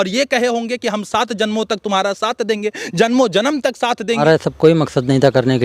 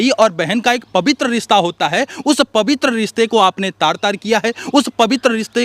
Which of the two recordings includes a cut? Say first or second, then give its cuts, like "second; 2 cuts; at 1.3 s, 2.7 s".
first; 1 cut; at 4.2 s